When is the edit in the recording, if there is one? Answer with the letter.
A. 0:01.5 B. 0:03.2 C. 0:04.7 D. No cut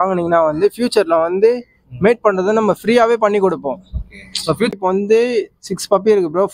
C